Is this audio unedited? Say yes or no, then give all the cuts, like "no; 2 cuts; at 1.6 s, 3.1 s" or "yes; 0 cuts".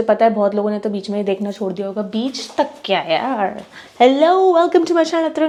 yes; 0 cuts